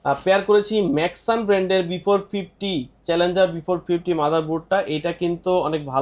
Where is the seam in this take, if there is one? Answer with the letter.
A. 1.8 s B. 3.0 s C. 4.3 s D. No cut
D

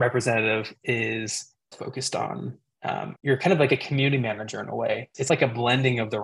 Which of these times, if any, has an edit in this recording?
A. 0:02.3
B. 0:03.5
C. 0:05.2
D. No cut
C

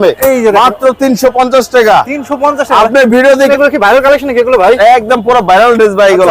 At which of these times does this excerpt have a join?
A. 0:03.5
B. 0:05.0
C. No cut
A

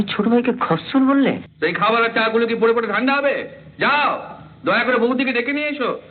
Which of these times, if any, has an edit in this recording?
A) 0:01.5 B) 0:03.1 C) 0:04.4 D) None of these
A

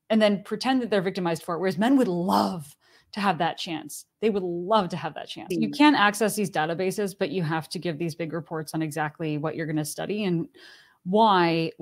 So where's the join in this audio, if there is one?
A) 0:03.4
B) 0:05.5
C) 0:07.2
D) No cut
B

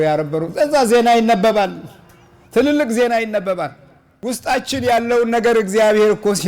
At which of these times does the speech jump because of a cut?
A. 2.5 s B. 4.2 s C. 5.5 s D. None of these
B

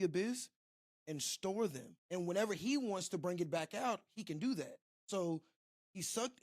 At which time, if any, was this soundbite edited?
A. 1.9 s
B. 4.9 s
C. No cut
A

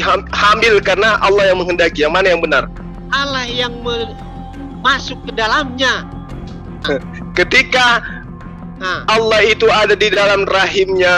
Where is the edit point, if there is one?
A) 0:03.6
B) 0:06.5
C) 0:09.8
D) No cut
B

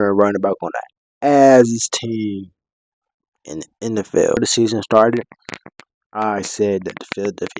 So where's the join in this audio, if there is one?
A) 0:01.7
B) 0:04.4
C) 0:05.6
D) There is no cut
B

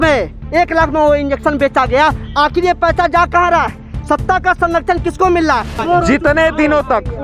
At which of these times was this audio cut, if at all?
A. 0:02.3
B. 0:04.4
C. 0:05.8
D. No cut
C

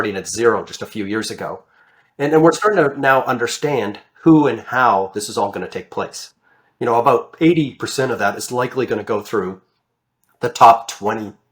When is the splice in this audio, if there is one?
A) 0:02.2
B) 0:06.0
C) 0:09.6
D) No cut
D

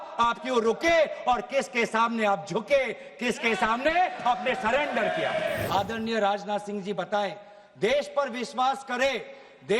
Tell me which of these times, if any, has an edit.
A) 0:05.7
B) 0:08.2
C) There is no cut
A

